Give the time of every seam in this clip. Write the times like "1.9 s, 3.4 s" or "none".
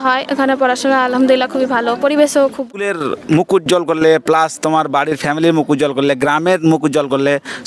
2.7 s